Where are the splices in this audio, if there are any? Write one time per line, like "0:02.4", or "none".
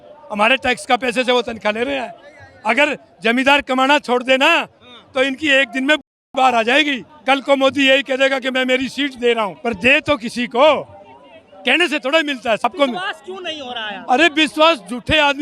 0:07.1
0:09.6
0:12.6